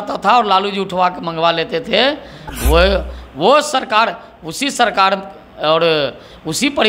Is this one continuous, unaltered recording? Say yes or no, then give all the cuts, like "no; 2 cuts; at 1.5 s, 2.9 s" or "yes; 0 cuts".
yes; 0 cuts